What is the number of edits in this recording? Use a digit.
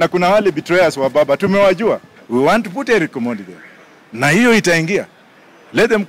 1